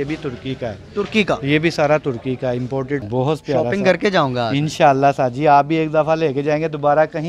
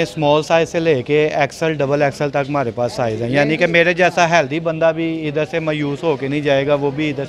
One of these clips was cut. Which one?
first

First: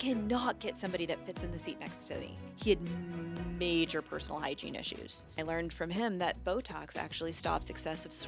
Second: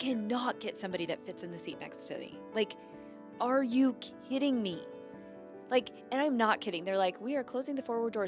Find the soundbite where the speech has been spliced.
first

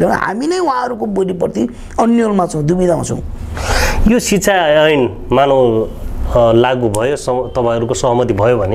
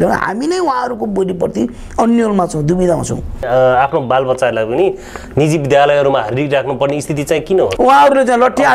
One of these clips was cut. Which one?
second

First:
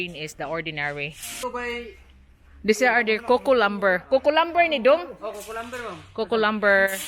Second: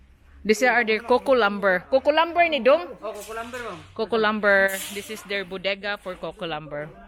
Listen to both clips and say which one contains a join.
first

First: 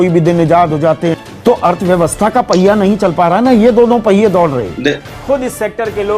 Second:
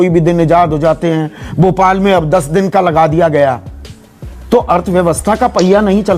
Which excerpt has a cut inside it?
first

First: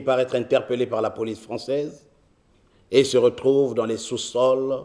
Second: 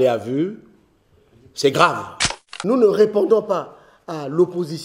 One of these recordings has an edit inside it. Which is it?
second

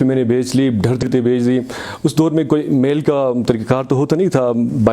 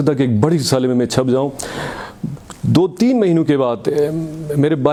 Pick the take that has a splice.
first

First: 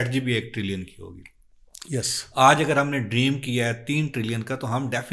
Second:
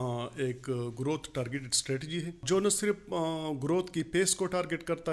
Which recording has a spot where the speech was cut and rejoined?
second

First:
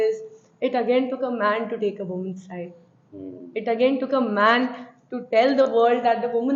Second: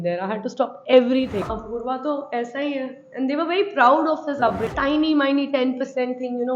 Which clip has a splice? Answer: second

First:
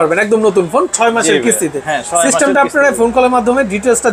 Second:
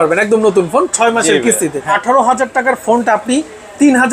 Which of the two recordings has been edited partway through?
second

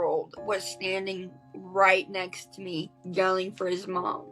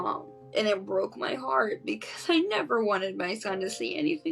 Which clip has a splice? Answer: first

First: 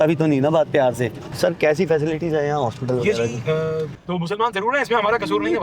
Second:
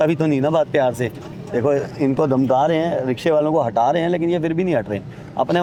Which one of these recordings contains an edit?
first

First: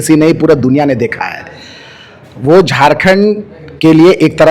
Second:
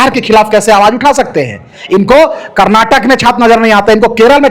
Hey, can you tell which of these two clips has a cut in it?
second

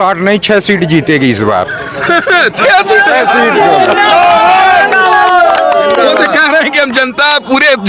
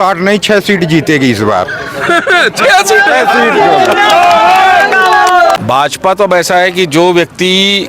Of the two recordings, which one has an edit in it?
second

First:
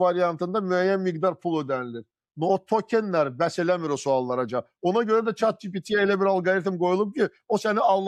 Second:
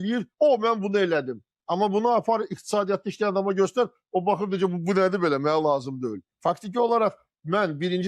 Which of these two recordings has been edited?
second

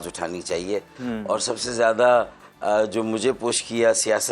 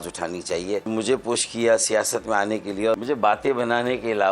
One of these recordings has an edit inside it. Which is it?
second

